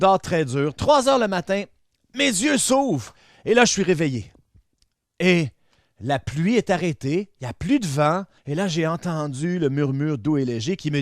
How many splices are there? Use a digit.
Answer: 1